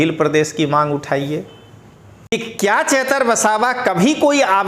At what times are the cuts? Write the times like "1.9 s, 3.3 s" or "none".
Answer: 2.3 s